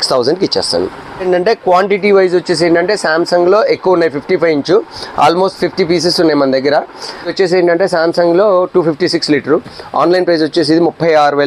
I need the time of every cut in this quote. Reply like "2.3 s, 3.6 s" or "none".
1.2 s, 7.3 s